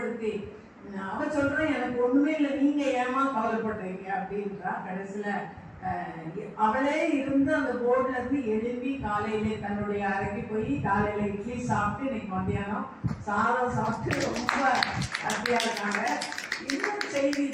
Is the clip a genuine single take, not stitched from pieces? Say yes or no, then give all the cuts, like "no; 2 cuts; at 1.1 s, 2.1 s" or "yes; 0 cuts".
yes; 0 cuts